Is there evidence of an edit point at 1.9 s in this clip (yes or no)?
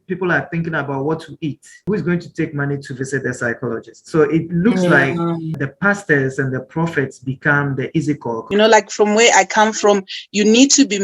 yes